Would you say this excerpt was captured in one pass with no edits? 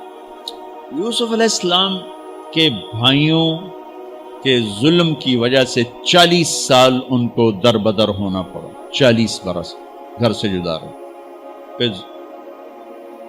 no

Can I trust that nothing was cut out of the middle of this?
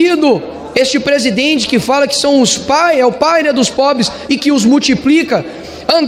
yes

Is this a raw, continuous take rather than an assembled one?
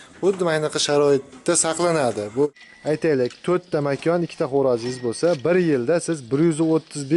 no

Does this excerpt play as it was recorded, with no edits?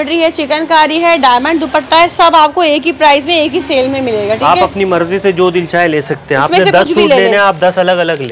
yes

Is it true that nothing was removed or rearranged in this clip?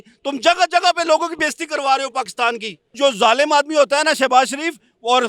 no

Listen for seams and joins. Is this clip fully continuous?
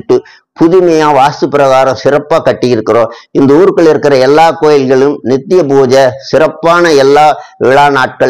yes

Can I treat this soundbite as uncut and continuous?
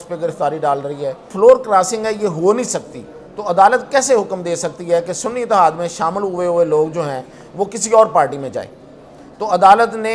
no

